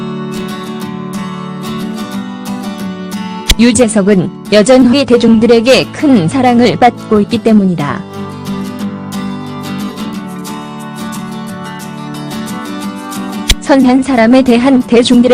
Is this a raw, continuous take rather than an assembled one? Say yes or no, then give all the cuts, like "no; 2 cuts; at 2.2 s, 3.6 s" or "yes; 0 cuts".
no; 1 cut; at 5.4 s